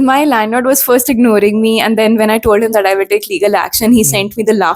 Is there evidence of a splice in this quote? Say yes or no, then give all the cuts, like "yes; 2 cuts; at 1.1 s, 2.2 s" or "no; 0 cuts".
no; 0 cuts